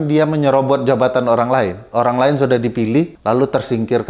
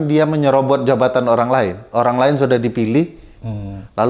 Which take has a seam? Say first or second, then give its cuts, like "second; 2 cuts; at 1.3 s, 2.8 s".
first; 1 cut; at 3.2 s